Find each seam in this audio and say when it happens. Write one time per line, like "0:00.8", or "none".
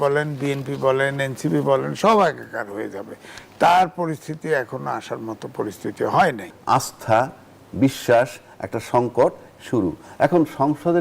0:06.5